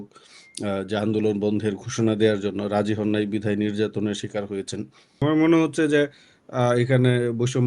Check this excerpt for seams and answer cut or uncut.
cut